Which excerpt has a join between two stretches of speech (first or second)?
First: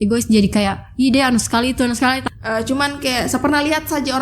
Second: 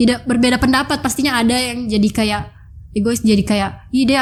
first